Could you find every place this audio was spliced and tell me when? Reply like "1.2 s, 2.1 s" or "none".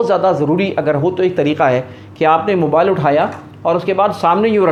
none